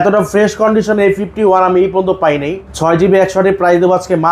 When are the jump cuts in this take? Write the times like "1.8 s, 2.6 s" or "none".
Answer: 2.7 s

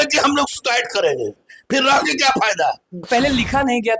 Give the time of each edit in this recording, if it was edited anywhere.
3.1 s

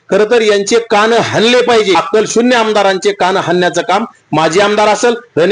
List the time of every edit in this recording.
1.9 s

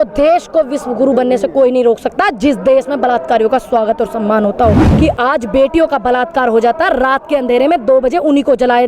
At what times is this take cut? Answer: 4.9 s

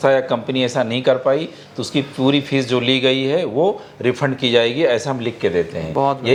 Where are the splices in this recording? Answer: none

